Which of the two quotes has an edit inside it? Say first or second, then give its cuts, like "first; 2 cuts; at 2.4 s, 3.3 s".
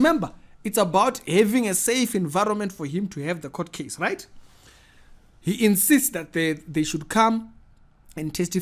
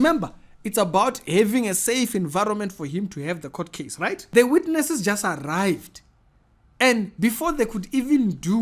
second; 1 cut; at 4.2 s